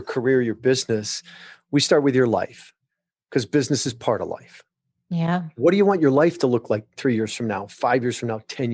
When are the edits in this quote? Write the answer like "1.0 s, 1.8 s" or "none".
none

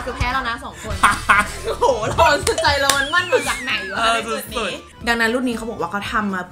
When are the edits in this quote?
4.8 s

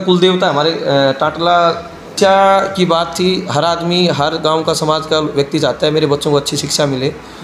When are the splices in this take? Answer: 2.1 s

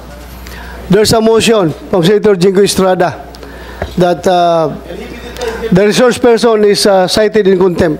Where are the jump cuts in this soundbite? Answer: none

